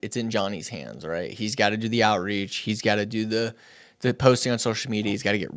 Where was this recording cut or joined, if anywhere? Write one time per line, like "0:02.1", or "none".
none